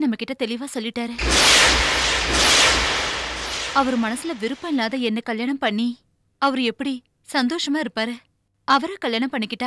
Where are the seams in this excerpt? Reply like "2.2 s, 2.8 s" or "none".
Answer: none

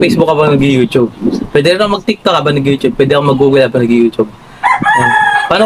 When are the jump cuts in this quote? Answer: 4.5 s

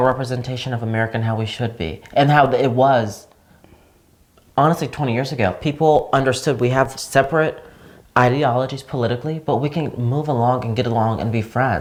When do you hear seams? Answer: none

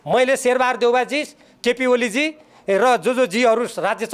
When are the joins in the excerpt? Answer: none

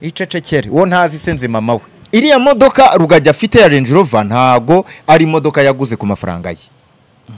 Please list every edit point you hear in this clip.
1.9 s

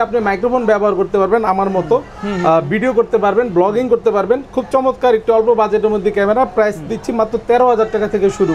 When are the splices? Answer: none

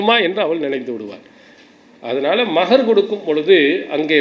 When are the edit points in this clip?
none

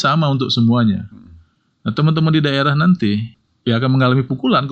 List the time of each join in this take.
3.3 s

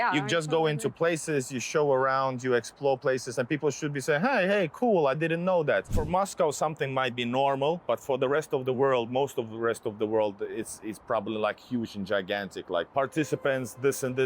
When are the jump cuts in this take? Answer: 6.0 s, 7.8 s, 12.9 s

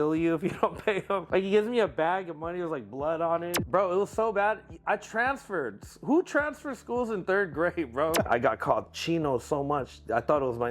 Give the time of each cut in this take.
1.2 s, 3.6 s, 8.3 s

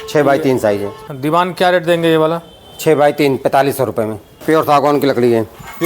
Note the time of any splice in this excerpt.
1.0 s, 4.3 s

